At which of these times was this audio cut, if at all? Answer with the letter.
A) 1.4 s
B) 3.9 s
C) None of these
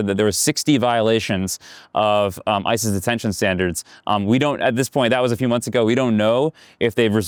C